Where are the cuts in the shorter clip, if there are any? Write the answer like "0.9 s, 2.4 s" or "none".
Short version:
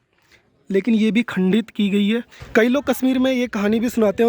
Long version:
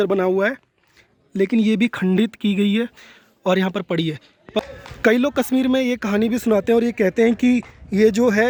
2.4 s